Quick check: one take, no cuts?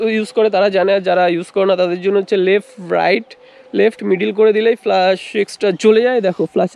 yes; 0 cuts

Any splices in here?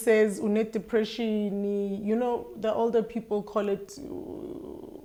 no; 0 cuts

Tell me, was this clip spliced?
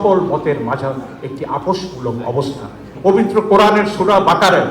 yes; 1 cut; at 2.8 s

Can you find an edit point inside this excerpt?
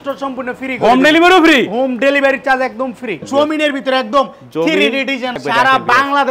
yes; 2 cuts; at 3.2 s, 5.4 s

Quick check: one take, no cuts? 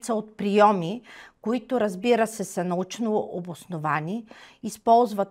yes; 0 cuts

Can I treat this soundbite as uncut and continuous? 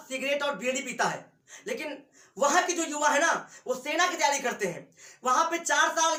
yes; 0 cuts

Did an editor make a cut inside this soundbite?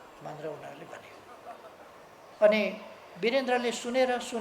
yes; 1 cut; at 2.3 s

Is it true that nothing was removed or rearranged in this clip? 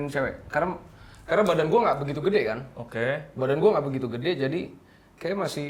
yes; 0 cuts

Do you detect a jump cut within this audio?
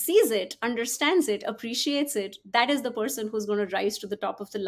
no; 0 cuts

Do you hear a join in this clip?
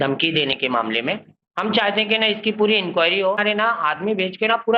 yes; 1 cut; at 3.4 s

